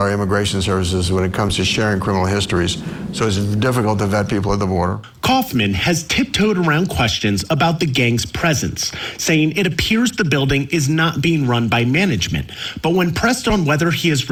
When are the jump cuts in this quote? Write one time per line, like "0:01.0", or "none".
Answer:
none